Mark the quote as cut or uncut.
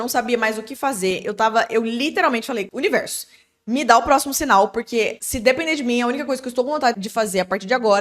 cut